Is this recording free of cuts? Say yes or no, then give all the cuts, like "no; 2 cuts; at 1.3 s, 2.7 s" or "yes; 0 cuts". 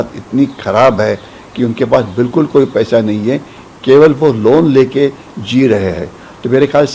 yes; 0 cuts